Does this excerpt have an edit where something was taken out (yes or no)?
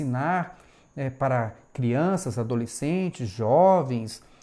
no